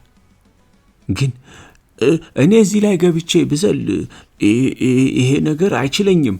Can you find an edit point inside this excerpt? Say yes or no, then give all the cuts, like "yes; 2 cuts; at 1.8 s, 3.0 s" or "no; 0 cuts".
yes; 1 cut; at 1.0 s